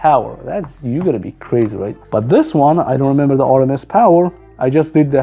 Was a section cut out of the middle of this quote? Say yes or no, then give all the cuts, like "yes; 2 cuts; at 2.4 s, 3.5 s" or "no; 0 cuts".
no; 0 cuts